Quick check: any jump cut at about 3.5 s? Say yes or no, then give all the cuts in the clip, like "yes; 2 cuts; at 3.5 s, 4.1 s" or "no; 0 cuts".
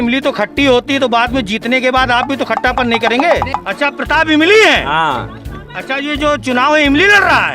yes; 1 cut; at 3.5 s